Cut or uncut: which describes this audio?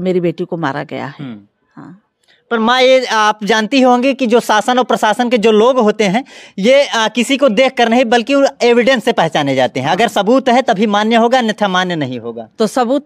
uncut